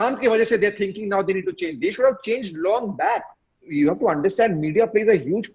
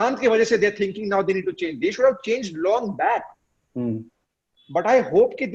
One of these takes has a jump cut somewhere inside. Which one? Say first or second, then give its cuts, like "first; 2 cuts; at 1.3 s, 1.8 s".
first; 1 cut; at 3.7 s